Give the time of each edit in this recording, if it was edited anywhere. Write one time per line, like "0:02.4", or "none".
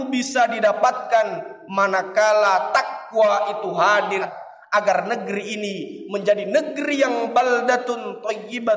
0:04.3